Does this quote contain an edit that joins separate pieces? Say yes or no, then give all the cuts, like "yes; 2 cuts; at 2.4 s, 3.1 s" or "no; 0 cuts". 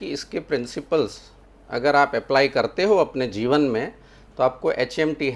no; 0 cuts